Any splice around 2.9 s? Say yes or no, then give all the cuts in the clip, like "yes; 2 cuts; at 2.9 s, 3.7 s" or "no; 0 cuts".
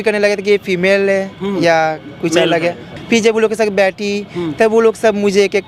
yes; 1 cut; at 2.9 s